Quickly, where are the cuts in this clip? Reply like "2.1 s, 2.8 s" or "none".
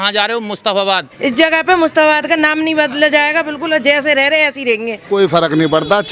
1.1 s, 5.1 s